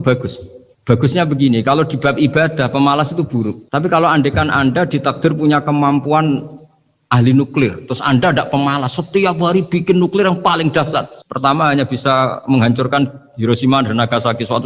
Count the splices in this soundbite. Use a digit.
0